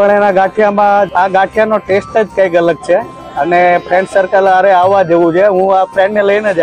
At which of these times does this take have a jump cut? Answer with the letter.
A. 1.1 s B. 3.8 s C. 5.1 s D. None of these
A